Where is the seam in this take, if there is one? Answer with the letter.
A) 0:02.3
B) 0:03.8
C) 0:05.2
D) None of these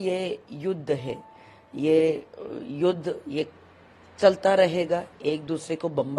D